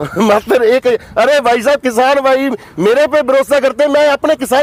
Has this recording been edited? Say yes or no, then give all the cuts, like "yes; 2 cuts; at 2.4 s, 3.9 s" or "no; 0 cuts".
no; 0 cuts